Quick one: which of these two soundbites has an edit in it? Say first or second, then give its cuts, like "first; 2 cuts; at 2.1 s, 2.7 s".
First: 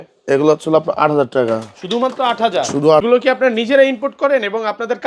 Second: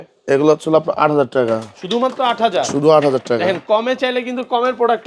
first; 1 cut; at 3.0 s